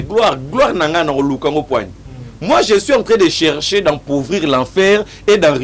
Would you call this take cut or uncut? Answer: uncut